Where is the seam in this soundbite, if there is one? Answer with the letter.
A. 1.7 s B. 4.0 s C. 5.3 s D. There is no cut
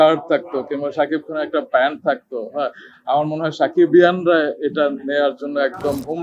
D